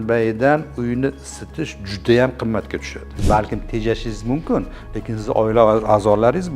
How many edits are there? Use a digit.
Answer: 1